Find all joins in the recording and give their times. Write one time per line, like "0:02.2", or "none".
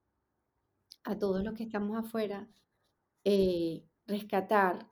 none